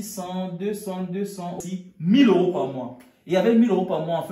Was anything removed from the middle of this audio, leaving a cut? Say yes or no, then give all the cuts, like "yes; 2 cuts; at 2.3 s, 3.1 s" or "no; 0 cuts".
yes; 1 cut; at 1.6 s